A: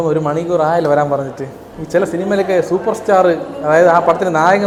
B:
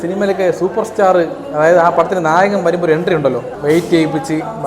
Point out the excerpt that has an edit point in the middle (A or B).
B